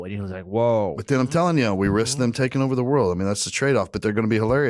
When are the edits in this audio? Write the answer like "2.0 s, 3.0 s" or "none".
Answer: 1.0 s